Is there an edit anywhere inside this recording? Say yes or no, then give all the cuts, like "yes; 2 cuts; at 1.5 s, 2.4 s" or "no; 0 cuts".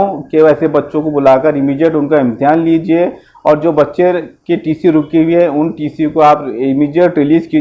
no; 0 cuts